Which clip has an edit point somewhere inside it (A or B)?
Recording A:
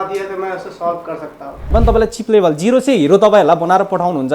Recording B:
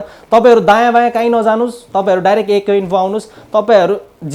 A